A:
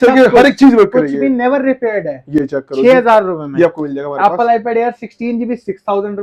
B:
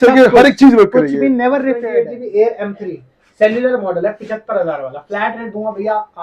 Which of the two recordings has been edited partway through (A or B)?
B